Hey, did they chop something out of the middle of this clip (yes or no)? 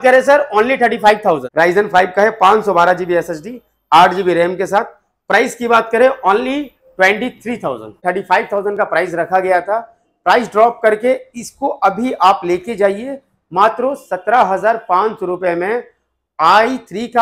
yes